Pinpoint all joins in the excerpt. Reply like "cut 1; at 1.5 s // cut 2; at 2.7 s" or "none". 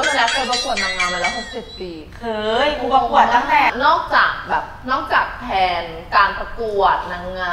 cut 1; at 3.7 s